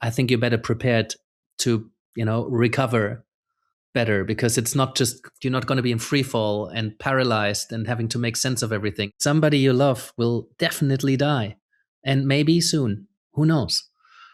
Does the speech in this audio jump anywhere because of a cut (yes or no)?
yes